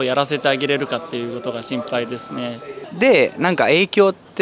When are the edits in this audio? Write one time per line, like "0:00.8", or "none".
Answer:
0:02.8